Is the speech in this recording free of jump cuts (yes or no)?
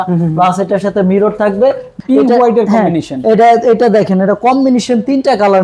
no